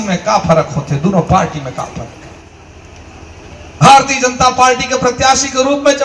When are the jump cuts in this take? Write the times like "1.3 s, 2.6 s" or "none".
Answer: none